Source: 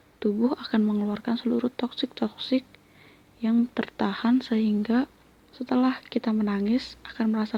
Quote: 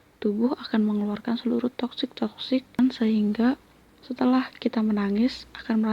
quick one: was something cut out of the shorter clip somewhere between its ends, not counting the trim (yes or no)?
yes